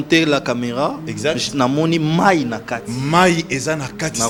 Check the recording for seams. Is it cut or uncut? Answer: uncut